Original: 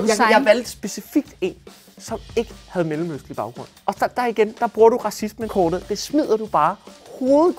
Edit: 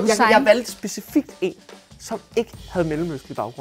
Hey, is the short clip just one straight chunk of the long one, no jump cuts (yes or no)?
yes